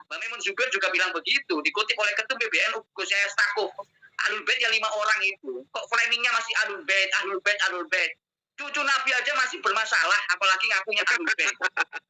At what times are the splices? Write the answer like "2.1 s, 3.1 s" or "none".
none